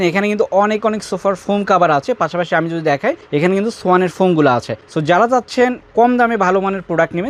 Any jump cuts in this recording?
no; 0 cuts

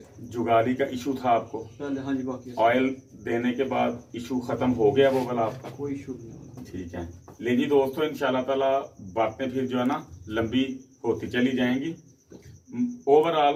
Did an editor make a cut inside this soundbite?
no; 0 cuts

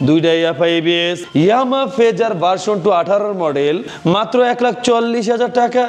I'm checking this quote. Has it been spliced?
no; 0 cuts

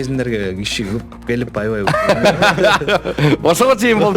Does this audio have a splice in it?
no; 0 cuts

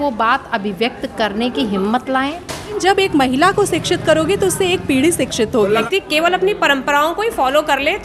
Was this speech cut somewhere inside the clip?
yes; 2 cuts; at 2.8 s, 5.9 s

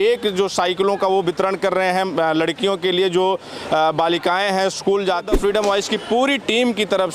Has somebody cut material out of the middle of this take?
yes; 1 cut; at 5.3 s

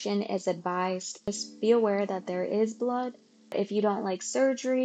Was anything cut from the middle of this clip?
yes; 1 cut; at 1.3 s

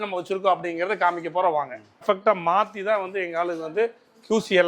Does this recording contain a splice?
yes; 1 cut; at 2.0 s

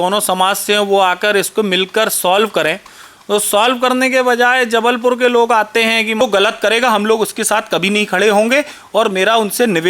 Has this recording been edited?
yes; 1 cut; at 6.2 s

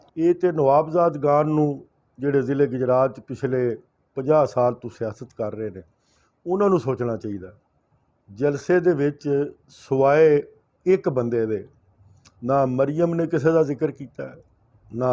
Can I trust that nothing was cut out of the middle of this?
yes; 0 cuts

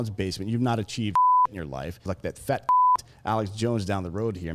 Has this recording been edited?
yes; 1 cut; at 2.2 s

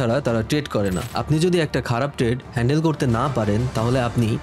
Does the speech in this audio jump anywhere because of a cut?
yes; 1 cut; at 1.1 s

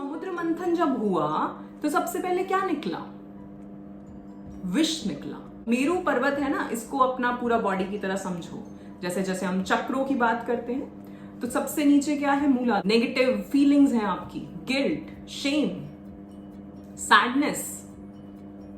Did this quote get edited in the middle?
yes; 2 cuts; at 5.7 s, 12.8 s

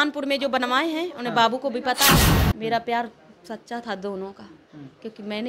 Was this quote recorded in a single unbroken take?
no; 1 cut; at 2.4 s

